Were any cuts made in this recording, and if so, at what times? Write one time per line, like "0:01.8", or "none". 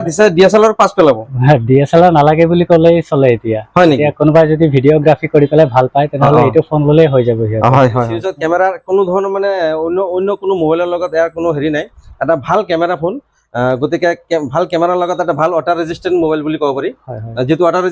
0:08.2